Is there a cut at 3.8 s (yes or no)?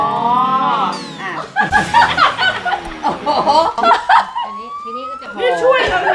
yes